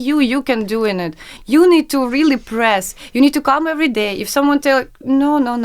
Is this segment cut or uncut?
cut